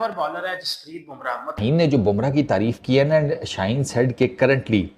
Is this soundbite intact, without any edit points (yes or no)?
no